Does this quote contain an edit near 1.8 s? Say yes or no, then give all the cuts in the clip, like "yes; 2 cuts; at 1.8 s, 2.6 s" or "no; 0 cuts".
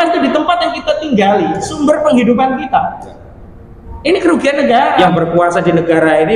no; 1 cut; at 5.0 s